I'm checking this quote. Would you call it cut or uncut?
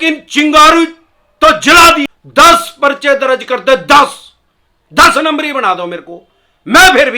cut